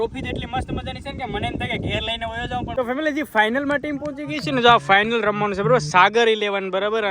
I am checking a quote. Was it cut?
yes; 1 cut; at 2.7 s

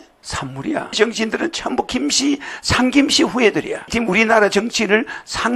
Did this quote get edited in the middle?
yes; 1 cut; at 1.0 s

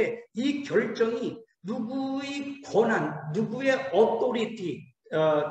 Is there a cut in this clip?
no; 0 cuts

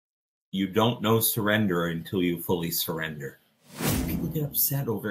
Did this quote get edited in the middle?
yes; 1 cut; at 4.0 s

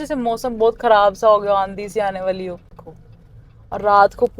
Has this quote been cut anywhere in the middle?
yes; 1 cut; at 2.9 s

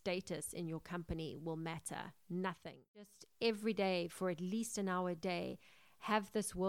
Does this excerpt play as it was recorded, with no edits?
no; 1 cut; at 3.2 s

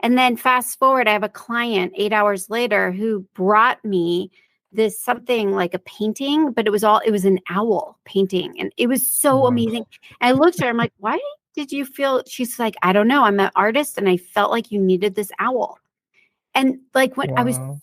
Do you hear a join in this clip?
no; 0 cuts

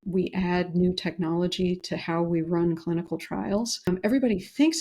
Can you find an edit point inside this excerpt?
yes; 1 cut; at 3.9 s

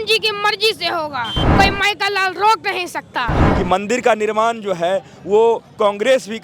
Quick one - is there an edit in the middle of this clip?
yes; 2 cuts; at 1.4 s, 3.4 s

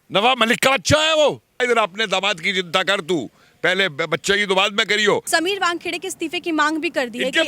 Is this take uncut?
no; 2 cuts; at 1.6 s, 5.2 s

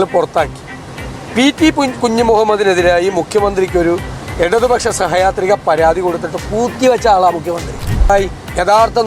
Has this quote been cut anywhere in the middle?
yes; 1 cut; at 8.1 s

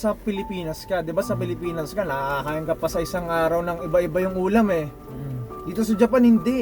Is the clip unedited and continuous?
yes; 0 cuts

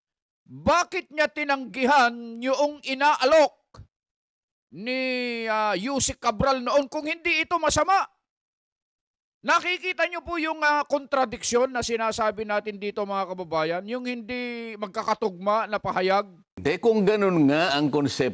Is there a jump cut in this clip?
yes; 1 cut; at 16.6 s

